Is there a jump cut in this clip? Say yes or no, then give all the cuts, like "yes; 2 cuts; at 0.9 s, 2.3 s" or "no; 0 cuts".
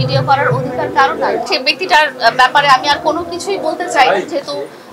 yes; 1 cut; at 1.4 s